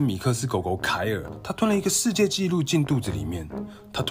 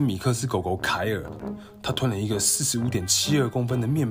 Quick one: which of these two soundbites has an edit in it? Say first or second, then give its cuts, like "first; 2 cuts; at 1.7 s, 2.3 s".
second; 1 cut; at 1.4 s